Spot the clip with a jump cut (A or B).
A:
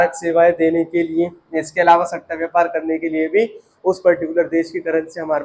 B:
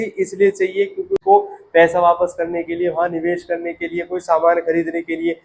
B